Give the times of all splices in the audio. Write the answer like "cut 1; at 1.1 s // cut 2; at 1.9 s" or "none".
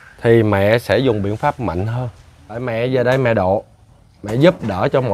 cut 1; at 2.6 s